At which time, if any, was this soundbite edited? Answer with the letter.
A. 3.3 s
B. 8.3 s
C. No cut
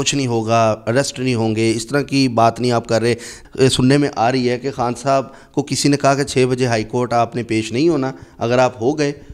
A